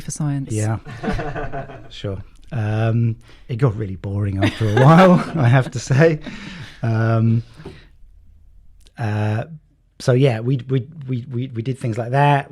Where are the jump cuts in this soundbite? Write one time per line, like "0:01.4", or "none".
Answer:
none